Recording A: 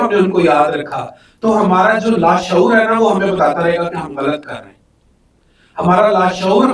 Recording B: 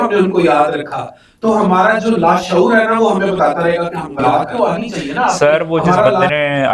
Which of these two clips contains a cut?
B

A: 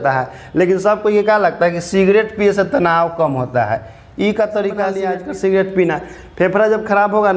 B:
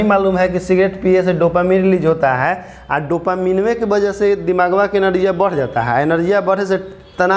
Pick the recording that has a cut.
A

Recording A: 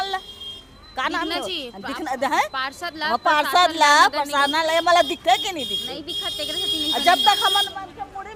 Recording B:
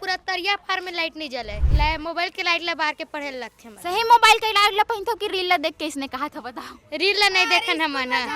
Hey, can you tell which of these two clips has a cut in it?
B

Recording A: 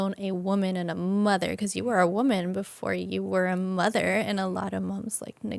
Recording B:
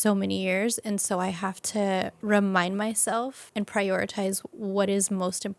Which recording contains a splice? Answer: B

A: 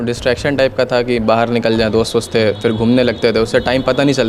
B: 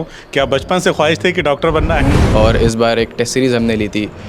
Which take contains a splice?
B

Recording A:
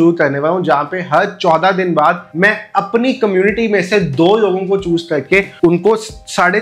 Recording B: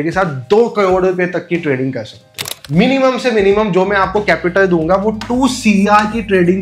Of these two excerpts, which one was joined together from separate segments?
A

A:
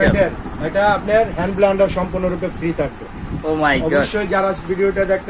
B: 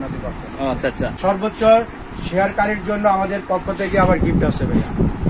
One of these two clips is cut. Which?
B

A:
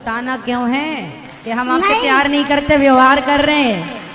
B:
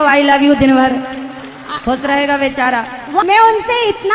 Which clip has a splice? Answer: B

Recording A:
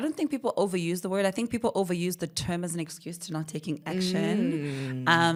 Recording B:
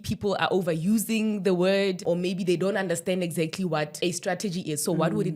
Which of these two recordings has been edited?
B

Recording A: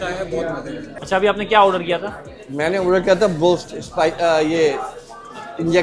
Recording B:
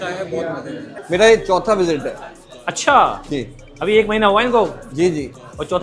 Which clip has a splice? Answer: B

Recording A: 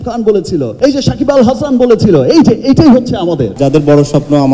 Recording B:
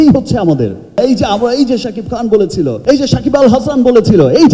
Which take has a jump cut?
A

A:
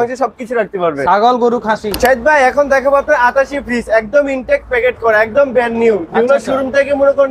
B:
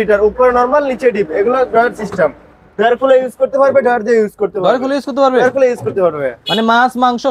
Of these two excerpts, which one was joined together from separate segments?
A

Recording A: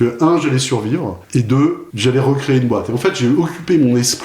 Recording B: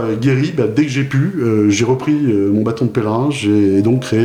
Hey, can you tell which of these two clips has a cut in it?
A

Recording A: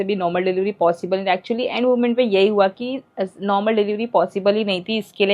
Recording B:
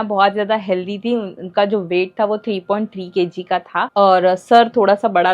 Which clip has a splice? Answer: B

